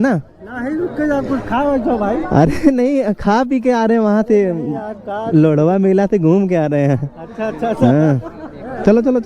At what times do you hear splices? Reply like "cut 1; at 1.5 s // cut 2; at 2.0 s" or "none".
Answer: none

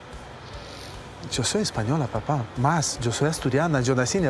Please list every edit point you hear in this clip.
none

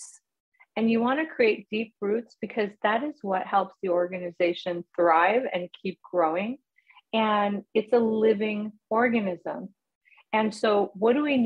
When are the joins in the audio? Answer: none

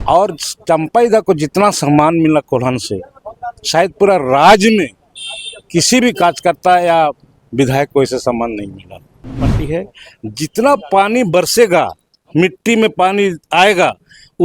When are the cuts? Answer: cut 1; at 9.5 s

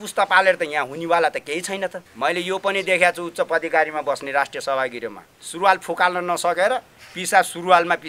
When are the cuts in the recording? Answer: cut 1; at 2.0 s

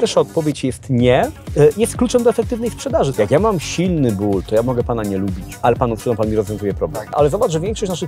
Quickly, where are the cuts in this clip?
cut 1; at 1.4 s // cut 2; at 3.1 s // cut 3; at 5.5 s // cut 4; at 7.2 s

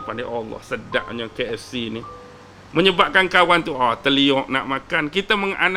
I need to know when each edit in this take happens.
none

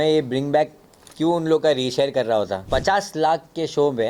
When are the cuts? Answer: cut 1; at 2.6 s

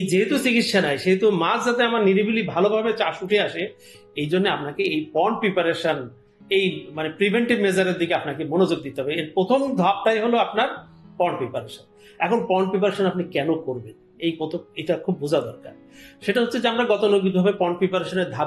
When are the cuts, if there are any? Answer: none

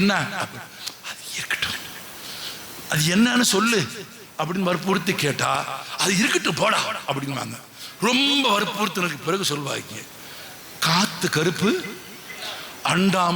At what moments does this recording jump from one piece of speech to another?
none

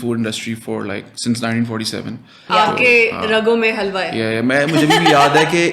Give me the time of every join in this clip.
cut 1; at 2.3 s

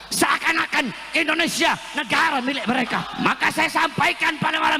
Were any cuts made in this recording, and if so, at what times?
cut 1; at 3.0 s

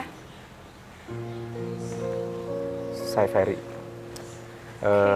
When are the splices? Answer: cut 1; at 1.1 s // cut 2; at 3.1 s

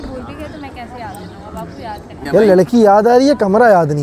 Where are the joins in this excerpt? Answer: cut 1; at 2.2 s

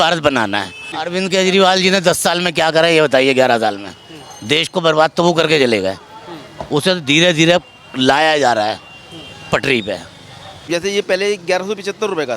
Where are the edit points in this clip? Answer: cut 1; at 0.9 s // cut 2; at 10.7 s

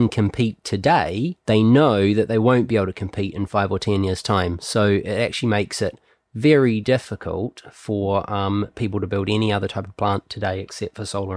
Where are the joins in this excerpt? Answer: cut 1; at 1.4 s

